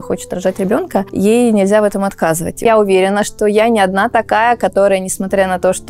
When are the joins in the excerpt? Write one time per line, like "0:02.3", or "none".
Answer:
0:01.1
0:02.6